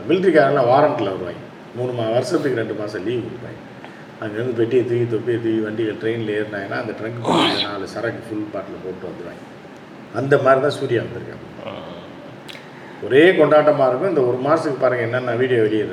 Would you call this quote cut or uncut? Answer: uncut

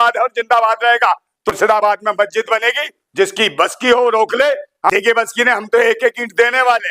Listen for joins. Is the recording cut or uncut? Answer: cut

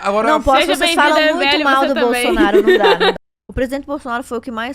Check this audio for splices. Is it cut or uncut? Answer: cut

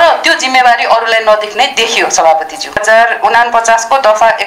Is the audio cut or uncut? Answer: cut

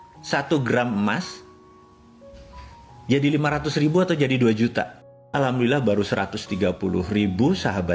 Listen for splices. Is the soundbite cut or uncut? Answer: cut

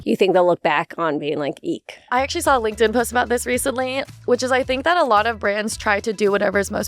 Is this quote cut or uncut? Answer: cut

